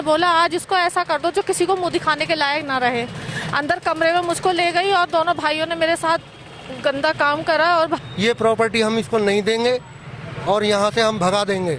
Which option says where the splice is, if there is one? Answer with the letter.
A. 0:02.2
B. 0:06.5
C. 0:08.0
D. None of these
C